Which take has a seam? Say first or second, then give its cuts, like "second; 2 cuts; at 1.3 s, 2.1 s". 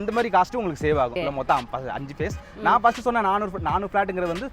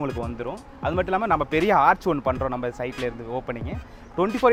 first; 1 cut; at 1.1 s